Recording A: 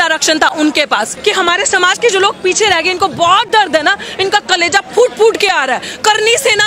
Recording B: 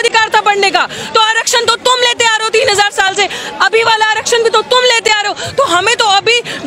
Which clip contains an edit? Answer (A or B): A